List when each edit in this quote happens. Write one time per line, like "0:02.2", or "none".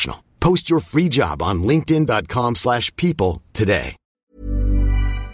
0:04.0